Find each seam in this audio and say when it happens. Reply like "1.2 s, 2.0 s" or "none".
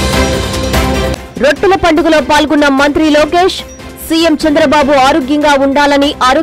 1.0 s